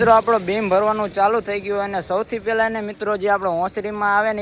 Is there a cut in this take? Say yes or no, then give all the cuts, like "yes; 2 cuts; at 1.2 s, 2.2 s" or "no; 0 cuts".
no; 0 cuts